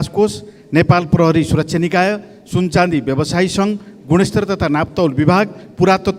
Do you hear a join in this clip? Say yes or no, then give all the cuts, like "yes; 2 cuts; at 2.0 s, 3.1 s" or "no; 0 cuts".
no; 0 cuts